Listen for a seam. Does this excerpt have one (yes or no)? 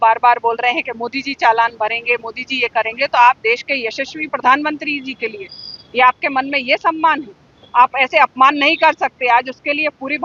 no